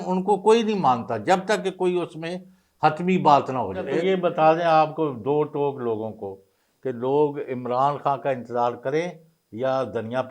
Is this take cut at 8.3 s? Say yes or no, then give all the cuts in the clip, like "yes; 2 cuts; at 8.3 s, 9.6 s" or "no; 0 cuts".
no; 1 cut; at 3.9 s